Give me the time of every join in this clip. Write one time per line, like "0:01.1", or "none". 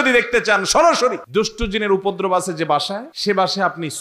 0:01.2
0:03.1